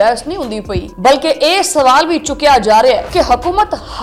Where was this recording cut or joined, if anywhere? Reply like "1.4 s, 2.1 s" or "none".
0.9 s, 3.1 s